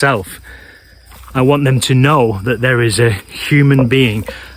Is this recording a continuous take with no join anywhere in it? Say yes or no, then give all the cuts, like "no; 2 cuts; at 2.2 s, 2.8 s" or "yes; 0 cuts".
yes; 0 cuts